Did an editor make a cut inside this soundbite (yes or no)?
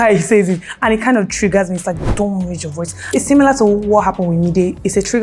yes